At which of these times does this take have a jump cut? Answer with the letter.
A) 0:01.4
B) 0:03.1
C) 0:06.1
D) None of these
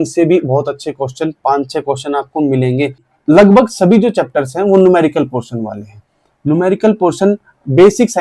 B